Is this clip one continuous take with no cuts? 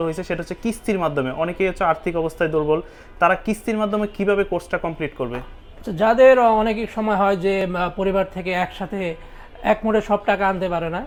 yes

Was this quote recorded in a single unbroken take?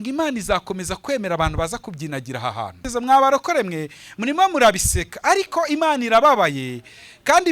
no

